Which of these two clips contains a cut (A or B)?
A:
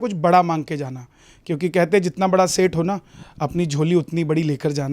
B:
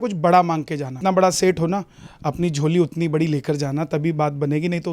B